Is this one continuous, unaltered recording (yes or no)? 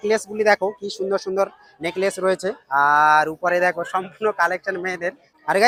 yes